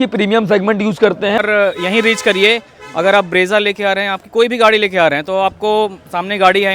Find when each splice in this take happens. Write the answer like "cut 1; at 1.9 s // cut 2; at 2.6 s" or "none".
cut 1; at 1.4 s

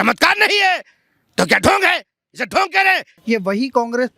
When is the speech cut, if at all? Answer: cut 1; at 3.1 s

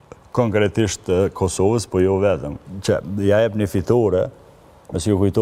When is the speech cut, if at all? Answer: cut 1; at 2.7 s

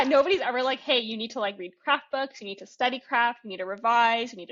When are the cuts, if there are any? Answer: none

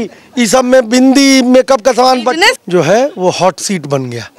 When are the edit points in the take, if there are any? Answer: cut 1; at 2.6 s

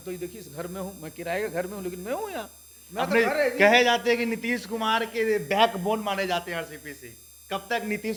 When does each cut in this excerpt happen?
none

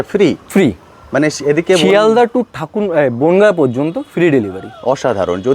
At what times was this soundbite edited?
none

